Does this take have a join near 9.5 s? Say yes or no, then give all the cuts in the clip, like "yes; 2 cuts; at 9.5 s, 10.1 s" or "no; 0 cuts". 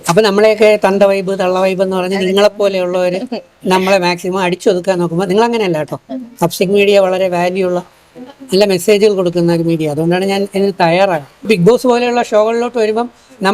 no; 1 cut; at 11.5 s